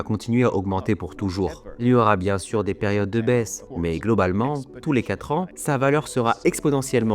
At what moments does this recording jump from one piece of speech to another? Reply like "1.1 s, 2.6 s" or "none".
3.6 s, 5.5 s